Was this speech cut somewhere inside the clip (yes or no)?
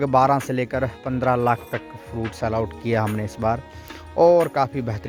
no